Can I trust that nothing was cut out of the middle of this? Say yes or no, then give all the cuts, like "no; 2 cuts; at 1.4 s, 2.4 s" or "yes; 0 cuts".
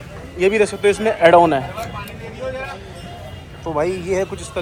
yes; 0 cuts